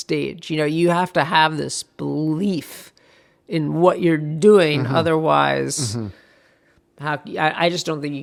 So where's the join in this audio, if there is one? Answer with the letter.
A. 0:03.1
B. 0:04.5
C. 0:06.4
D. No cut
D